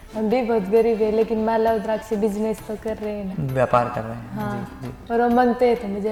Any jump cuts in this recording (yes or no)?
no